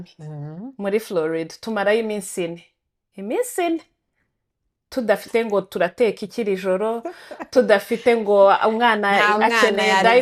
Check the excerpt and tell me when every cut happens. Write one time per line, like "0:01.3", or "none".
none